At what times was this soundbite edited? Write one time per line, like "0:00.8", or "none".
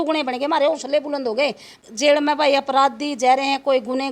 0:01.7